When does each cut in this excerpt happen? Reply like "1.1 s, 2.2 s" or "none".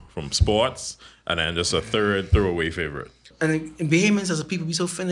3.3 s

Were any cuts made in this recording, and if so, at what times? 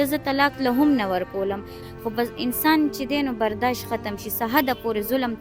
1.7 s

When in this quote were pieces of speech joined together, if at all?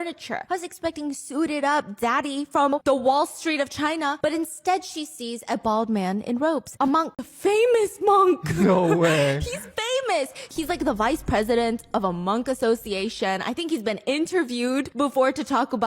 2.7 s, 7.3 s

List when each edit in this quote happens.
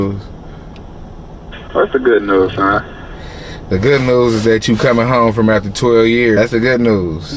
6.4 s

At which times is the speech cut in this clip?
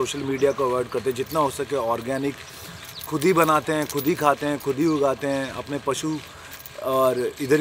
none

